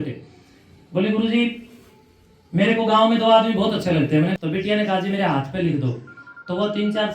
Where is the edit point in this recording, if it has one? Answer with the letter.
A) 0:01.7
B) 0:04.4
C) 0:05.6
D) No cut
B